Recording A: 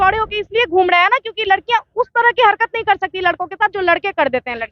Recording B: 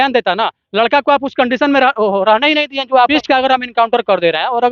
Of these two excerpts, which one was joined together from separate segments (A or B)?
B